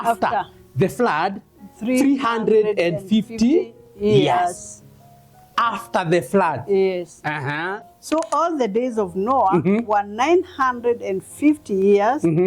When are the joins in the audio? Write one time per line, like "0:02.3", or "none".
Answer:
0:07.9